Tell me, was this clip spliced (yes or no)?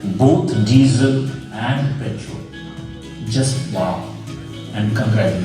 no